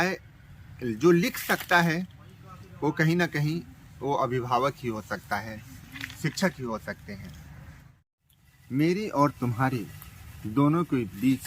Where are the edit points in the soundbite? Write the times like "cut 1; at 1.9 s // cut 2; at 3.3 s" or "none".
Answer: cut 1; at 7.9 s